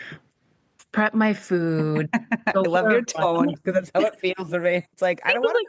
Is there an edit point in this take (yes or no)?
no